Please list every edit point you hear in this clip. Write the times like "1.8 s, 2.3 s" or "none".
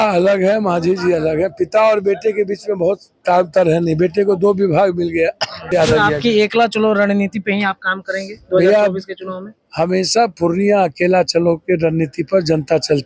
5.7 s